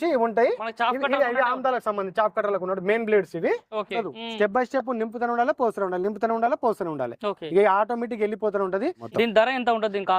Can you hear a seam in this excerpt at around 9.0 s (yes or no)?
yes